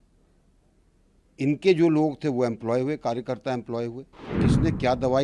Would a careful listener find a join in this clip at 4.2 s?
yes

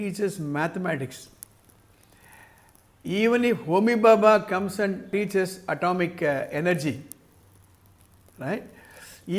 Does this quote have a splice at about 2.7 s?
no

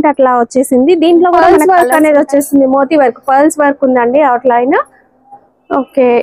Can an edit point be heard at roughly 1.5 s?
yes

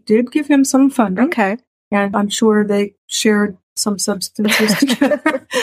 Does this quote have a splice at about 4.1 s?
no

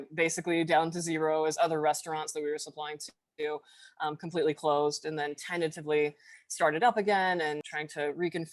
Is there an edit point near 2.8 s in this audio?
no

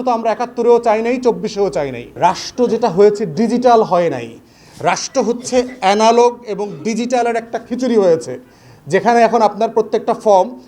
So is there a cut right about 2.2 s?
yes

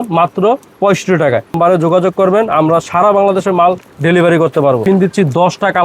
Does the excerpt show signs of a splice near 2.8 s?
no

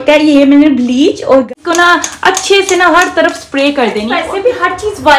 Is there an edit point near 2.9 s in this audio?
no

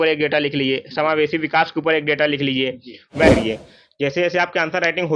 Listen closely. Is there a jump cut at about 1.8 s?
no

